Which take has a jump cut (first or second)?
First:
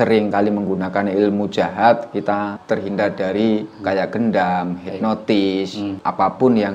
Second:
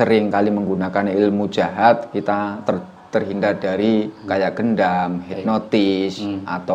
first